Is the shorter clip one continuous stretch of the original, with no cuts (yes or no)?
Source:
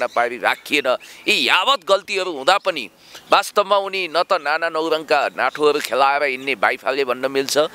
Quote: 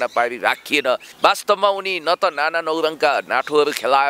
no